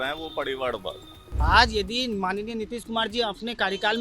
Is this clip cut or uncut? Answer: cut